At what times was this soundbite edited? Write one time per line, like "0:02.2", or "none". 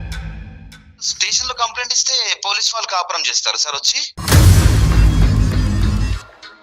0:01.2
0:04.1